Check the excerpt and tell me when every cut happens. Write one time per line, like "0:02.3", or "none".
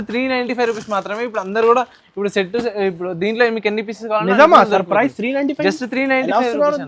none